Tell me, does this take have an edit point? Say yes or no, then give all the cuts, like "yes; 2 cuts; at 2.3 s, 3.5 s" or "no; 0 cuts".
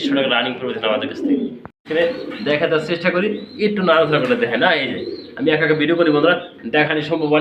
yes; 1 cut; at 1.9 s